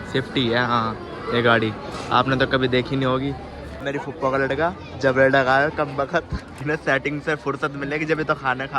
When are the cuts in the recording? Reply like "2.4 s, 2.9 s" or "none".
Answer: 3.8 s, 6.5 s